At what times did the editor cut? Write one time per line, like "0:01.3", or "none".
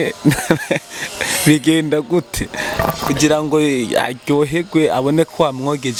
none